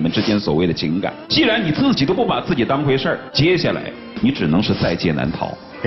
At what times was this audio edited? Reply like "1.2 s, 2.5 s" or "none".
1.2 s, 3.3 s